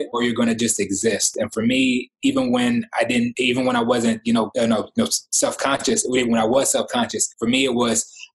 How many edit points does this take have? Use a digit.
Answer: 0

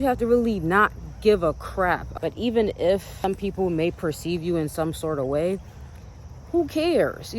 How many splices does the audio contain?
2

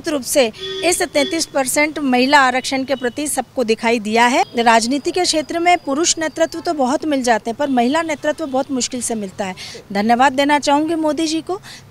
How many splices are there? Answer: 2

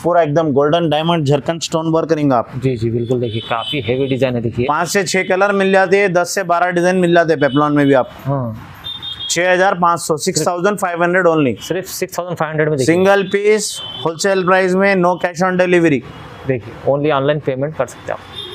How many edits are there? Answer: 0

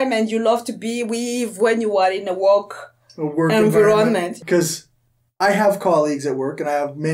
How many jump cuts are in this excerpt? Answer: 1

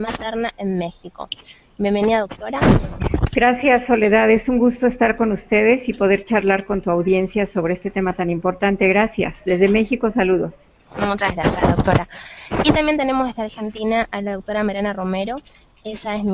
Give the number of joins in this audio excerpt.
0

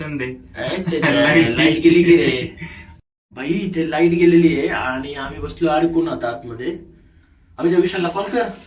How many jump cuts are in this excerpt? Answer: 0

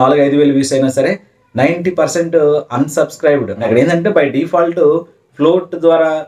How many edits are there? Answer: 1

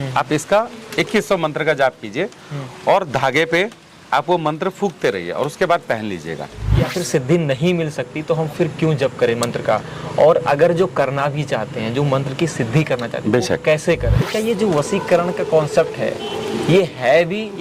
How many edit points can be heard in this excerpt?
2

